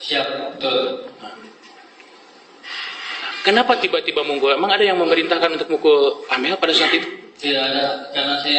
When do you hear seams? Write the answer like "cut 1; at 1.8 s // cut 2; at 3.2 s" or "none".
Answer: none

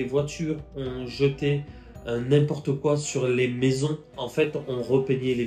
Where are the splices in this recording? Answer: cut 1; at 4.2 s

